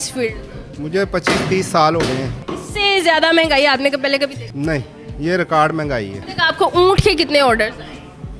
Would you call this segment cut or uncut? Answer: cut